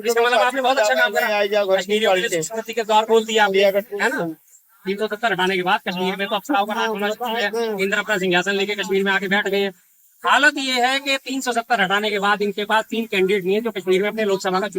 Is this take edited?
no; 0 cuts

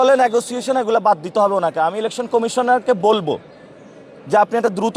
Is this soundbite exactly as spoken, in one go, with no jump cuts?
yes; 0 cuts

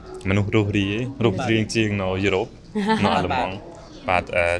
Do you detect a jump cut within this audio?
no; 0 cuts

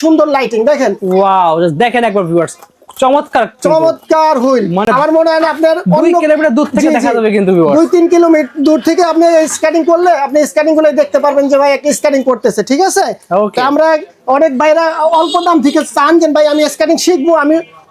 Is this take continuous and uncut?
yes; 0 cuts

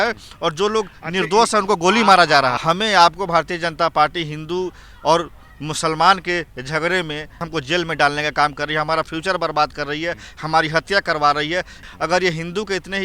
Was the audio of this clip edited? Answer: yes; 3 cuts; at 2.6 s, 7.4 s, 11.9 s

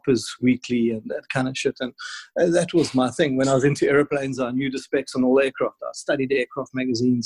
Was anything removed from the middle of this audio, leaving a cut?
no; 0 cuts

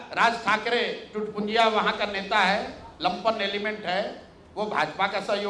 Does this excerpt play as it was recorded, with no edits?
yes; 0 cuts

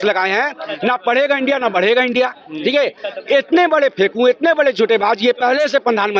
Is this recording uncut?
yes; 0 cuts

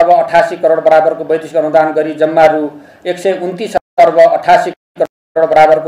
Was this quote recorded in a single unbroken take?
yes; 0 cuts

